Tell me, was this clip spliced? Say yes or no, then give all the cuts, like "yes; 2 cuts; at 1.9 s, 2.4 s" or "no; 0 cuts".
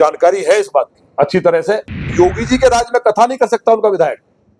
yes; 1 cut; at 2.1 s